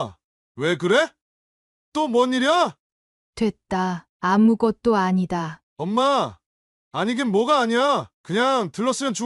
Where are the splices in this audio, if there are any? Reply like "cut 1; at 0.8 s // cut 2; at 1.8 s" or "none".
cut 1; at 2.8 s // cut 2; at 5.6 s